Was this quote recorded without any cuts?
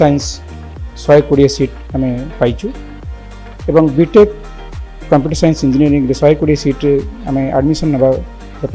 yes; 0 cuts

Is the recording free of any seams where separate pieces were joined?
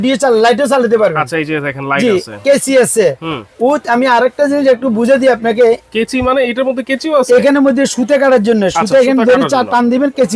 yes; 0 cuts

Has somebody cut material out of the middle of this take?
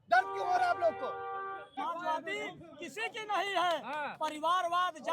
yes; 1 cut; at 1.7 s

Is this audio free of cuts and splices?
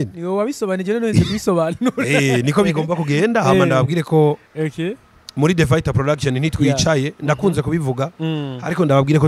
yes; 0 cuts

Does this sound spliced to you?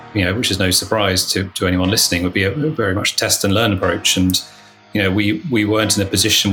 no; 0 cuts

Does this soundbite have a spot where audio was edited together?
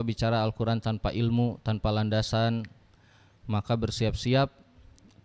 no; 0 cuts

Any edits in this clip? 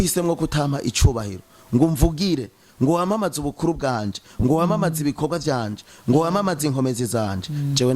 no; 0 cuts

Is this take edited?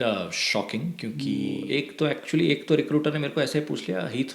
yes; 1 cut; at 1.6 s

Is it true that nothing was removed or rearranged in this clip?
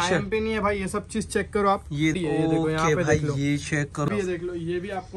no; 2 cuts; at 2.1 s, 4.1 s

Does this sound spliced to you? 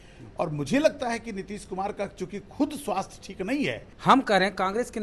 yes; 1 cut; at 3.9 s

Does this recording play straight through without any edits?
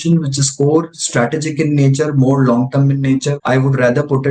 no; 1 cut; at 3.3 s

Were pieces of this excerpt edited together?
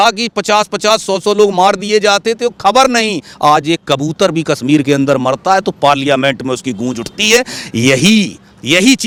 no; 0 cuts

